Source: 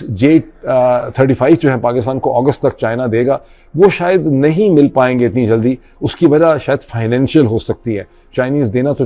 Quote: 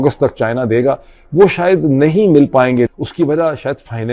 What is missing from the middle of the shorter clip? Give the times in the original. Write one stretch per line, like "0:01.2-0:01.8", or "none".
0:05.3-0:05.9

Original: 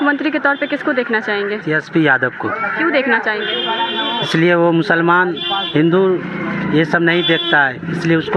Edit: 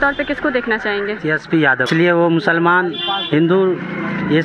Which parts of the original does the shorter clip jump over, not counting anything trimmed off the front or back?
0:02.3-0:04.3

